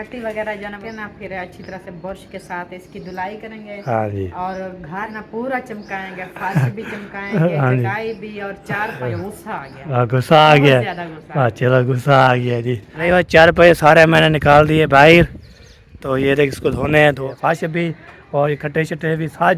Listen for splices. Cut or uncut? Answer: cut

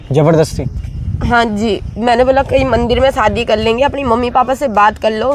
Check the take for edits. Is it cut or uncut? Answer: uncut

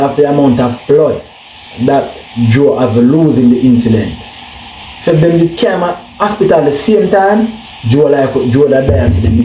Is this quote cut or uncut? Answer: uncut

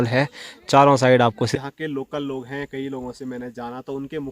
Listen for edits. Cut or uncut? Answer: cut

